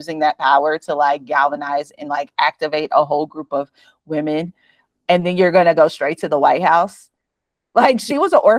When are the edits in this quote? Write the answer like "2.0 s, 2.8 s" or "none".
none